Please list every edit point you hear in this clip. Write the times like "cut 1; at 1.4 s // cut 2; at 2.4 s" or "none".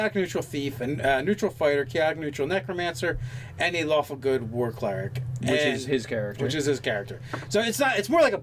none